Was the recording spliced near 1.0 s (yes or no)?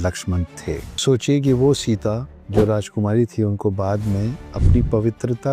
yes